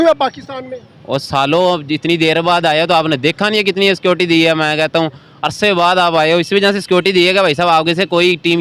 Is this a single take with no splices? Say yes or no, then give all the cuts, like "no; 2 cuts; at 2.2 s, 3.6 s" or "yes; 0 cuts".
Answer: yes; 0 cuts